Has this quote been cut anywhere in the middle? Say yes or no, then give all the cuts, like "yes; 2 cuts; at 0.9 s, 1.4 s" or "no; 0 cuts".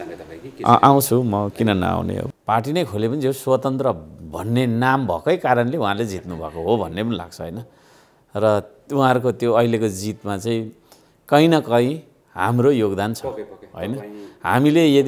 yes; 1 cut; at 2.3 s